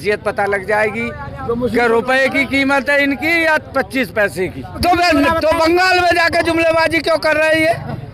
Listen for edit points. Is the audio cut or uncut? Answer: cut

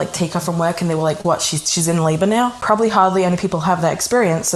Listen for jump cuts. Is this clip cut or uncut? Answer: cut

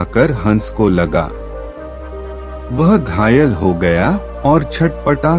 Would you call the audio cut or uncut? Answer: cut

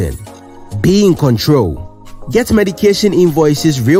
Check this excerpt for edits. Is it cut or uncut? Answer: uncut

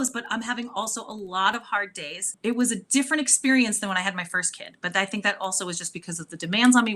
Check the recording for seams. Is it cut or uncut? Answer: cut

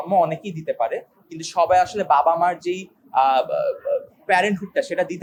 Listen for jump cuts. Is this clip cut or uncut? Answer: uncut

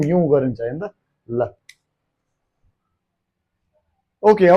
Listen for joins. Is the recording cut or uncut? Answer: uncut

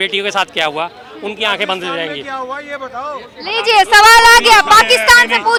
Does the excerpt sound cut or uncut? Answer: uncut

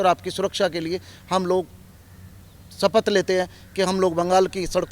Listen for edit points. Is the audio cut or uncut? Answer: uncut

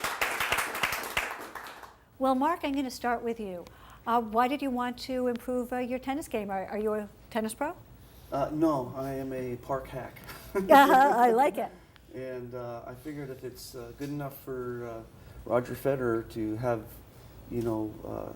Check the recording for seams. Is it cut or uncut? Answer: uncut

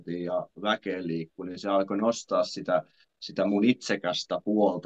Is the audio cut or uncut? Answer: uncut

